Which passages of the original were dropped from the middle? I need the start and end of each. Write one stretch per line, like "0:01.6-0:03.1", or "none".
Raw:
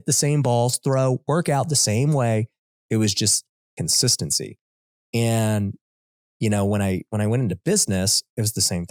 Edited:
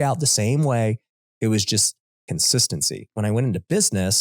0:04.6-0:07.1